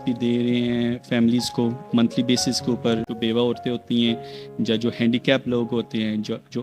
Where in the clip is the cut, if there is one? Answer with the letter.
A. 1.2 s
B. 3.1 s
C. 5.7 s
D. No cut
B